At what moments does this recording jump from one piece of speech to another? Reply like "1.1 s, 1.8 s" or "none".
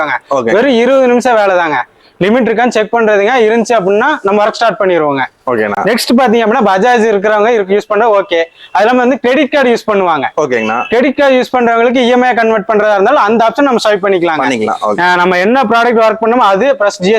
none